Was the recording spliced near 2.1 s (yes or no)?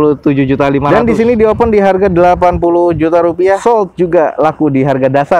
no